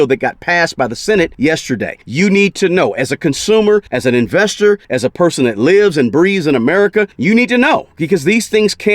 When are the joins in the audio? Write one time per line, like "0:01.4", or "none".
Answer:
0:01.6
0:03.9
0:04.9
0:07.1

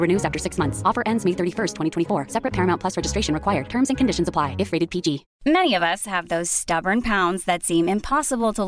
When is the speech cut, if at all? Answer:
0:05.3

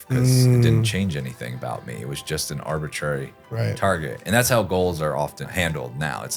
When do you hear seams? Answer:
0:05.4

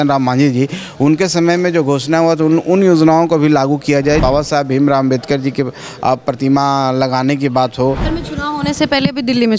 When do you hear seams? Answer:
0:04.2
0:08.1

